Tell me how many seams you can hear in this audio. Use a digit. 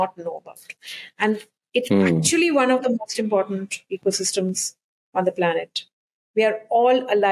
0